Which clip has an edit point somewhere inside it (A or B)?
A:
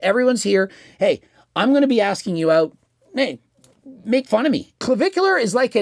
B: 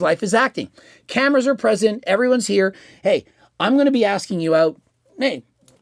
A